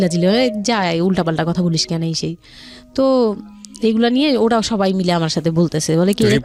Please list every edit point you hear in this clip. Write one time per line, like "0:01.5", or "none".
none